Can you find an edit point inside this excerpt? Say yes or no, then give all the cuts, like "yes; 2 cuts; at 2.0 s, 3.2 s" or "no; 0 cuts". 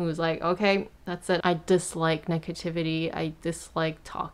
yes; 1 cut; at 1.4 s